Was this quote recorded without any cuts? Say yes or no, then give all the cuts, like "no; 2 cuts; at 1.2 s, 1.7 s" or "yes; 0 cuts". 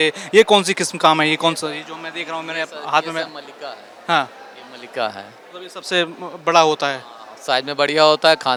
yes; 0 cuts